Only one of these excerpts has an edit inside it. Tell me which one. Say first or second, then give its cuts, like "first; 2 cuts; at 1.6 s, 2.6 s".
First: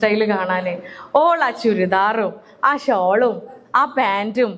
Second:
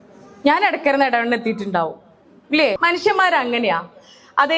second; 1 cut; at 2.8 s